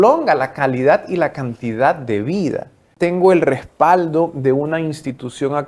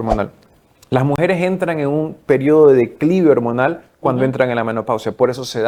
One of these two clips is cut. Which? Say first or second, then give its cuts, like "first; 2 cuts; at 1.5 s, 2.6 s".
first; 1 cut; at 2.8 s